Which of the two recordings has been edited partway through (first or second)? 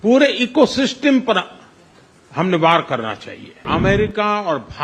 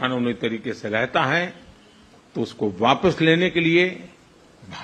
first